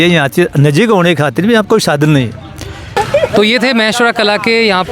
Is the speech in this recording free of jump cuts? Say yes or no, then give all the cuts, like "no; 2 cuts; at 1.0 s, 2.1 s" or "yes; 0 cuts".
yes; 0 cuts